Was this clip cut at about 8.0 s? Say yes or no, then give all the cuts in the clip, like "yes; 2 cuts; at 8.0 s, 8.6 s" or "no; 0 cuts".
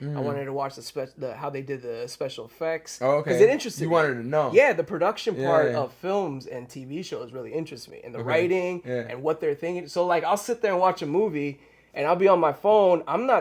no; 0 cuts